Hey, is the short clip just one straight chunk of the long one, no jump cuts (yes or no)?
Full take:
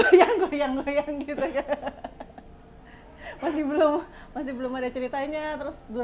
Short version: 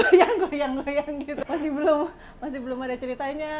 no